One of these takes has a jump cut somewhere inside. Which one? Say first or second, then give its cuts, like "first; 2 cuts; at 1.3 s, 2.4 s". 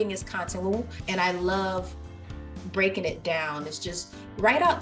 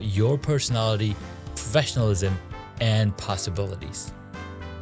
second; 1 cut; at 3.9 s